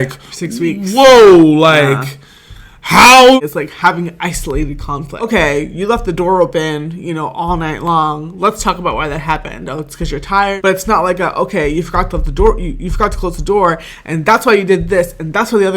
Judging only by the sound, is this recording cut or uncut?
cut